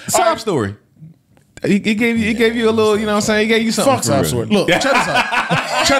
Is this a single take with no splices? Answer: yes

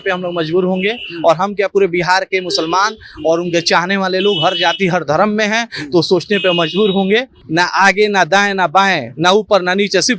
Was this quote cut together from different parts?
yes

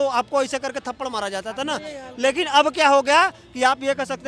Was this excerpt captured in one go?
yes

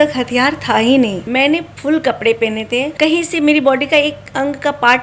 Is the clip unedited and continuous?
no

